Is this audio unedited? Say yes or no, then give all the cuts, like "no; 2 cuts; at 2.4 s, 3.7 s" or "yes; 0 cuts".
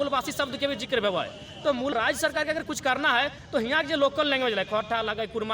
no; 1 cut; at 1.9 s